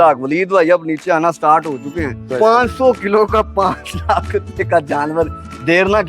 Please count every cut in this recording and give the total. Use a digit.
1